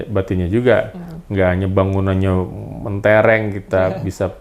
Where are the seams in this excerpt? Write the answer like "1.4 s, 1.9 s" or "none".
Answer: none